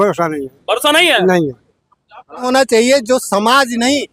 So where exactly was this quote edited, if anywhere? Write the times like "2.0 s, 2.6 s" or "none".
2.5 s